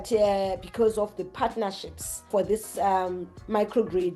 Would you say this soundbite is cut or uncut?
cut